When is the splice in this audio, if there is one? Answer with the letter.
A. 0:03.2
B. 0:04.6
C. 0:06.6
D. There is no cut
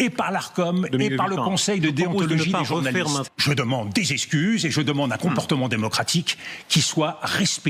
A